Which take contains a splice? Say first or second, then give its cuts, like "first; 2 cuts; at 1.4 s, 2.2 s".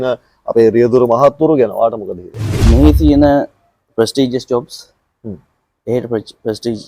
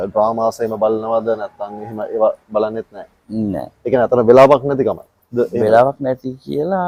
first; 1 cut; at 2.5 s